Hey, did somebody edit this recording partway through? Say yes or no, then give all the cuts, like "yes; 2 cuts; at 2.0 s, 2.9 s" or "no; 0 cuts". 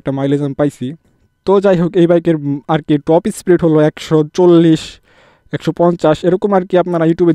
no; 0 cuts